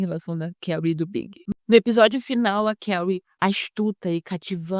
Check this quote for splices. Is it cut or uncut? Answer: cut